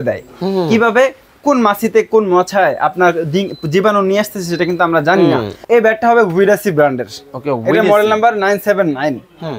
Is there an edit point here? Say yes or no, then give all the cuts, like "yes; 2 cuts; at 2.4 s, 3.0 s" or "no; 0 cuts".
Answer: yes; 1 cut; at 5.6 s